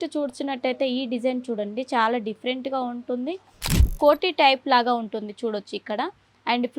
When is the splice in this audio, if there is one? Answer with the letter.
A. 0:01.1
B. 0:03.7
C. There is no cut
B